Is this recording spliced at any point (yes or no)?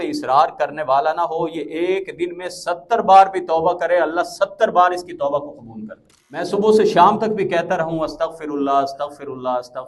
yes